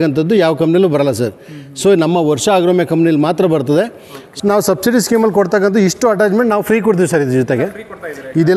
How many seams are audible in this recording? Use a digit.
1